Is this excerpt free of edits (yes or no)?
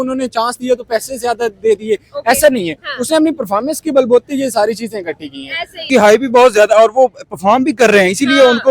no